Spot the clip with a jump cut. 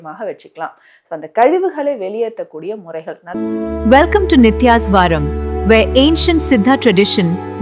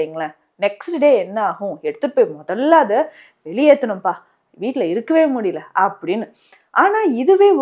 first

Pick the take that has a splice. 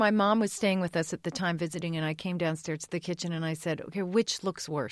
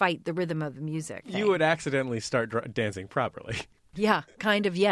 second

